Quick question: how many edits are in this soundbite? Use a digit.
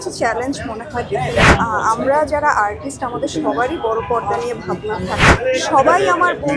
2